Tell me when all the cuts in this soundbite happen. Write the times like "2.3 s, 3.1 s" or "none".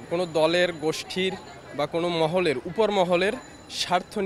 none